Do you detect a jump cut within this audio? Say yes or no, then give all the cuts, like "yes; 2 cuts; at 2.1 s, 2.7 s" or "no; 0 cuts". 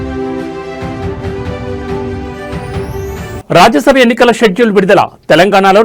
yes; 1 cut; at 3.4 s